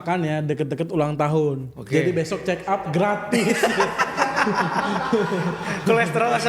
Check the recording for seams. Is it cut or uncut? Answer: uncut